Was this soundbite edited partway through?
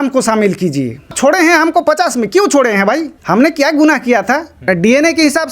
yes; 3 cuts; at 1.1 s, 3.1 s, 4.6 s

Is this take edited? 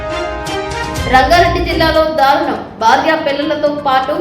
yes; 1 cut; at 1.0 s

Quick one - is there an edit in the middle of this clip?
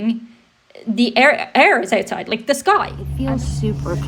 yes; 1 cut; at 3.0 s

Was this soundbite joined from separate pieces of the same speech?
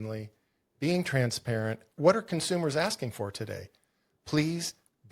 yes; 1 cut; at 1.9 s

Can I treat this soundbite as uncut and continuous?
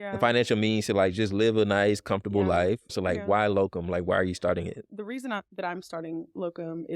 no; 2 cuts; at 2.9 s, 4.8 s

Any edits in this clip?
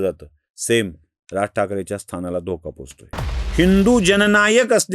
yes; 1 cut; at 3.4 s

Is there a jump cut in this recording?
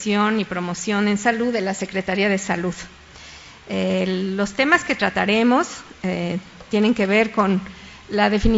no; 0 cuts

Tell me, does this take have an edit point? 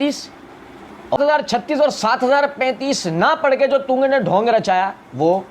yes; 1 cut; at 1.2 s

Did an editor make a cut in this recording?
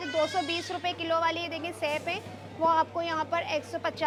no; 0 cuts

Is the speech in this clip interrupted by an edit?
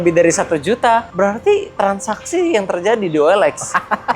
yes; 1 cut; at 1.1 s

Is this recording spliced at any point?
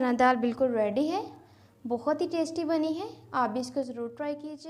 no; 0 cuts

